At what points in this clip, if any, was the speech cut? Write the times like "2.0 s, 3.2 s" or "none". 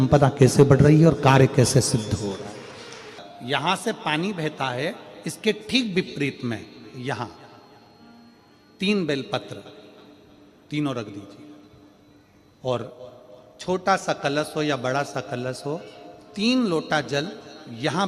none